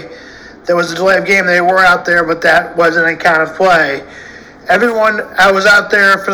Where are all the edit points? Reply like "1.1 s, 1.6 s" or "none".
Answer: none